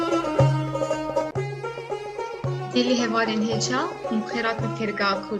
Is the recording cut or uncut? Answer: uncut